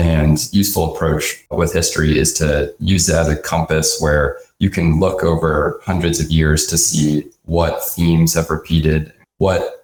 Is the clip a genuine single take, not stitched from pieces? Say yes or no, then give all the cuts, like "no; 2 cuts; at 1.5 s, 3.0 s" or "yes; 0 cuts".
yes; 0 cuts